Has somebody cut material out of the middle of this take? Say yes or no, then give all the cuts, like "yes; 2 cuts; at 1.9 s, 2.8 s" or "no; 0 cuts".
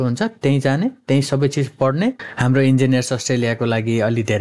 yes; 1 cut; at 2.3 s